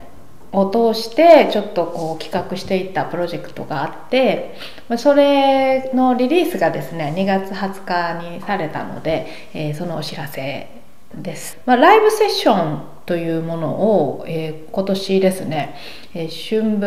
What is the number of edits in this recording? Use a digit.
1